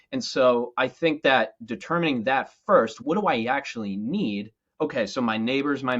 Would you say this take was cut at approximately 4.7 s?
no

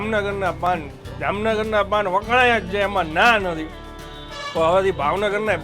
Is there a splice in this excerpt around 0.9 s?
yes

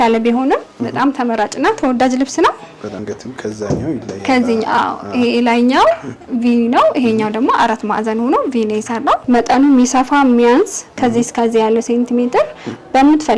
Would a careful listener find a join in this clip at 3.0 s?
yes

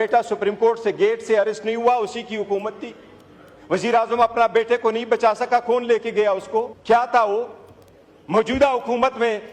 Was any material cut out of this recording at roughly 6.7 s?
yes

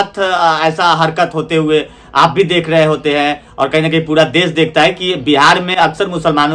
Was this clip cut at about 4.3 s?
no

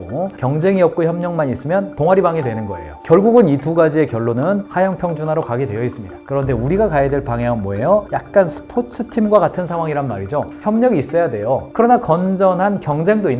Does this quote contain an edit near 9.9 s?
no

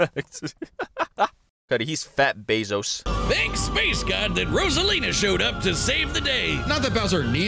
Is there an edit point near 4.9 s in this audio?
no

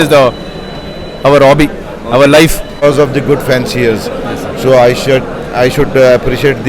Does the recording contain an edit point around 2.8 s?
yes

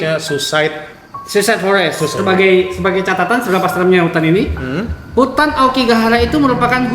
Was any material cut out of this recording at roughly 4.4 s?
no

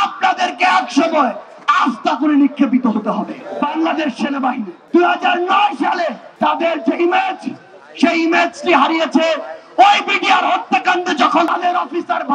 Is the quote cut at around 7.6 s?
no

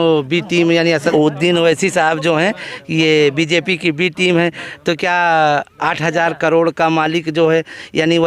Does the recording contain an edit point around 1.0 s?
yes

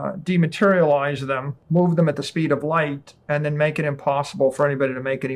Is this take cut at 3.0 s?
no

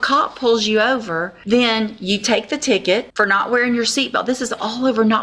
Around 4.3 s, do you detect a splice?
no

